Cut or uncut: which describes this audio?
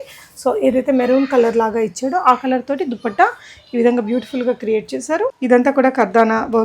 cut